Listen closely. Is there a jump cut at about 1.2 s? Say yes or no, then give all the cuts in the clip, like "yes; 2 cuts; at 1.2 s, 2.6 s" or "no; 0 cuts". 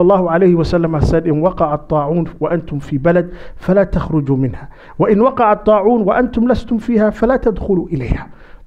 no; 0 cuts